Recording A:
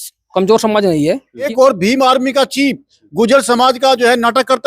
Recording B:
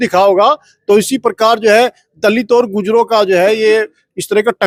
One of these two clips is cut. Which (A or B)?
A